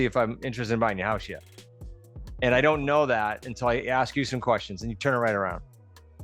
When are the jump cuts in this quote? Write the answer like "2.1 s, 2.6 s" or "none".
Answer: none